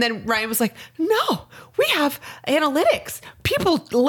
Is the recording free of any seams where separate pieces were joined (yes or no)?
yes